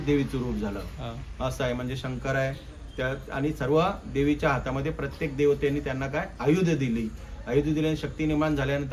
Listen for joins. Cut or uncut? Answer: uncut